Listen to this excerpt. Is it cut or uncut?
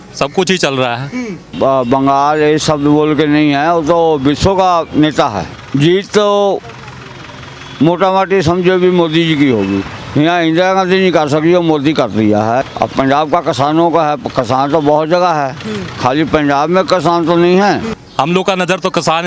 cut